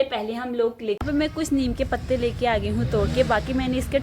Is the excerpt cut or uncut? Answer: cut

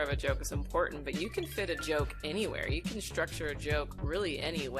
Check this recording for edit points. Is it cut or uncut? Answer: uncut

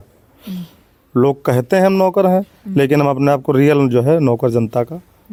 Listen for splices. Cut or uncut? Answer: uncut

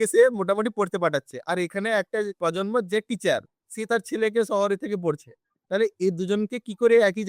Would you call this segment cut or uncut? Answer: cut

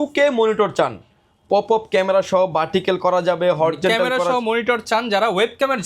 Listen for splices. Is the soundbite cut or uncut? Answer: uncut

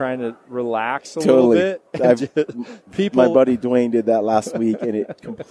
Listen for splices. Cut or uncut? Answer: uncut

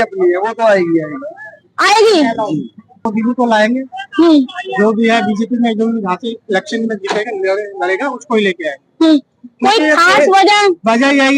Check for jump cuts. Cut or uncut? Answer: cut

